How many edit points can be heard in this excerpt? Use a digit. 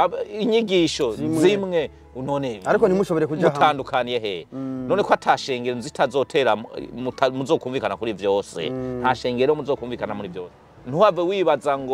1